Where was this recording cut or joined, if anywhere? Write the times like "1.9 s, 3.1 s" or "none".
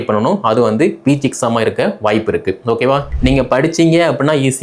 3.1 s